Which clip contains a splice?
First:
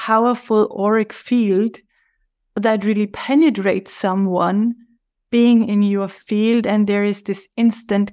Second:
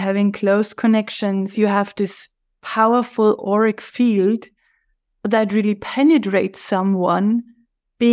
second; 1 cut; at 1.5 s

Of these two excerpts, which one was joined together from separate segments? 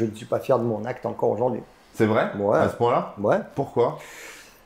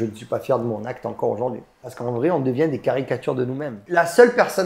second; 2 cuts; at 1.8 s, 3.9 s

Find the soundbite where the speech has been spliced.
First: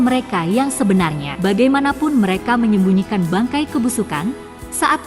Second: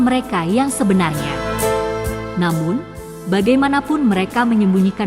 first; 1 cut; at 1.2 s

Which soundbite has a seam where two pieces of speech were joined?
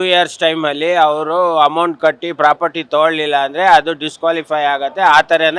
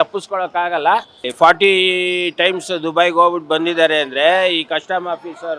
second; 1 cut; at 1.2 s

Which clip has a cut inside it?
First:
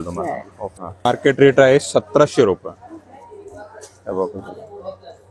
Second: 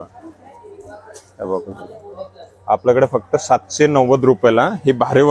first; 1 cut; at 1.1 s

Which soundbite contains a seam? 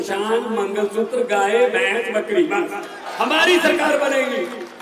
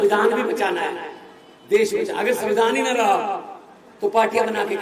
first; 1 cut; at 3.0 s

